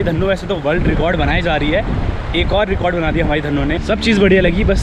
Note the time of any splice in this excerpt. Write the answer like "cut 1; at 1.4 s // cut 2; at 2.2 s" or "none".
cut 1; at 3.8 s